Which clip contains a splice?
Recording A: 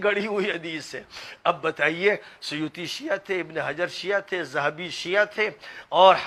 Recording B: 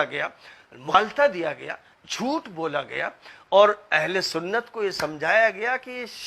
B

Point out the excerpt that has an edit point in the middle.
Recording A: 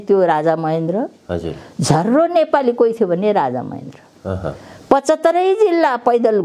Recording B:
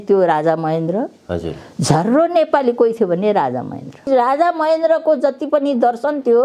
B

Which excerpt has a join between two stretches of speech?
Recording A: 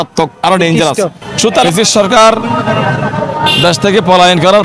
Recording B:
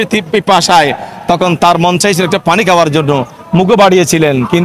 A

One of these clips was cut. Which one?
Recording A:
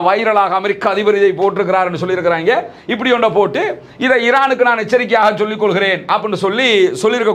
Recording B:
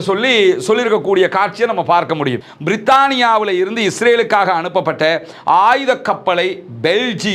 B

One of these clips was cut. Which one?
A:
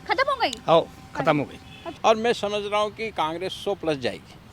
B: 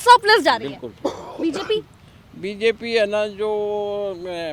A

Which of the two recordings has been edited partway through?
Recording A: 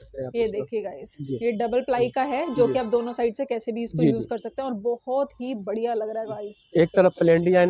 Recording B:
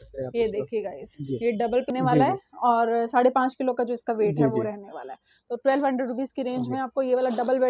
B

